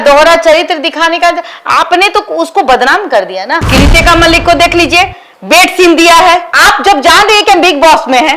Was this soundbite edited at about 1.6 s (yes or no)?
no